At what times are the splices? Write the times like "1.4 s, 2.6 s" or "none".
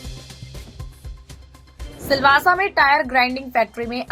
none